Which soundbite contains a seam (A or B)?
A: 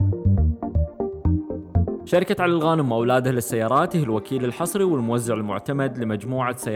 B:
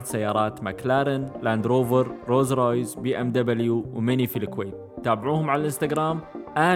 A